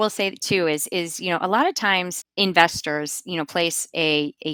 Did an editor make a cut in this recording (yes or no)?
no